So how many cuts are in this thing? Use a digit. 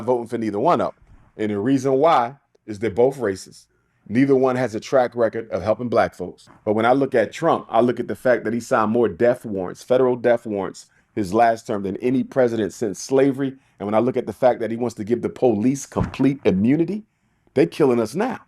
2